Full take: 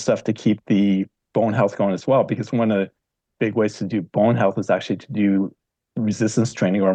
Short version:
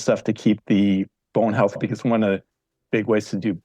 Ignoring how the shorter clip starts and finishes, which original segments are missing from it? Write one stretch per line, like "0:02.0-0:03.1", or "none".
0:01.8-0:02.3